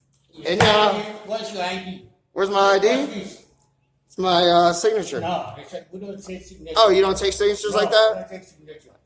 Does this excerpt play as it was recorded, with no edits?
yes; 0 cuts

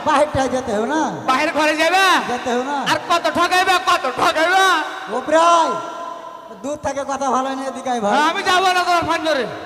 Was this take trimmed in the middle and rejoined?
no; 0 cuts

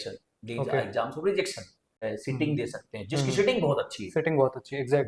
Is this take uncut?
no; 1 cut; at 1.9 s

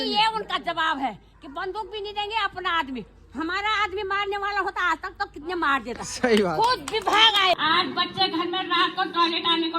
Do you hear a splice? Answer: yes; 1 cut; at 7.6 s

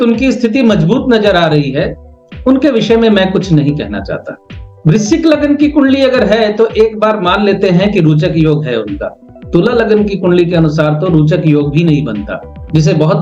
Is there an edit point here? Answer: no; 0 cuts

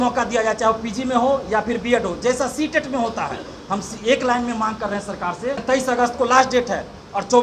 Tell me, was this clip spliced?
yes; 1 cut; at 5.6 s

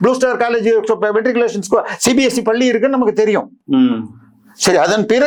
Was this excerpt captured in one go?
yes; 0 cuts

